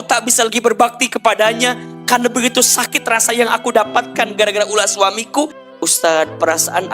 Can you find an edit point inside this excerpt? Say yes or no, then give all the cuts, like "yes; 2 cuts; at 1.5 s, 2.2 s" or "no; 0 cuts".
yes; 1 cut; at 5.6 s